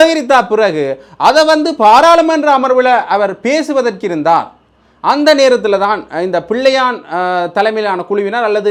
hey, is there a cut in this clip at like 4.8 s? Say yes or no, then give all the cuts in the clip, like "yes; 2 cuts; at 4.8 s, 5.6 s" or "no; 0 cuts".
no; 0 cuts